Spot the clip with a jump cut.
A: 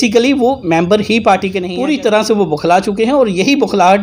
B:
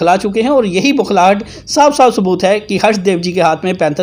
A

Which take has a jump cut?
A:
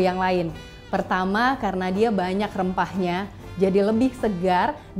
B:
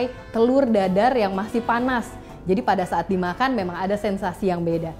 A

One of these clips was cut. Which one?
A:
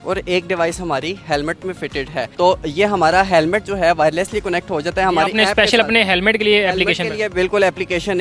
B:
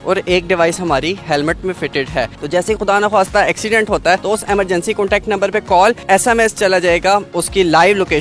B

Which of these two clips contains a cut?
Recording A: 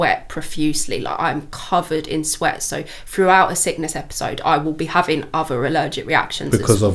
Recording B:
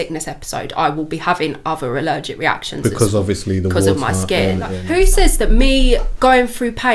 B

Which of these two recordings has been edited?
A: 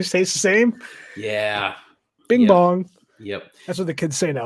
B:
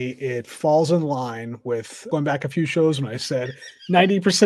B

